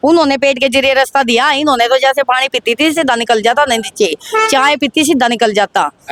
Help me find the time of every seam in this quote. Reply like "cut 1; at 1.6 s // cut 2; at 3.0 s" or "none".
none